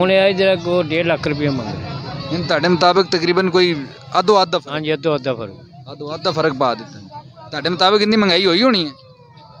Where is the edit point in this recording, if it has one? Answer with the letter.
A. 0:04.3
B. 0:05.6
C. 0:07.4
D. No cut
D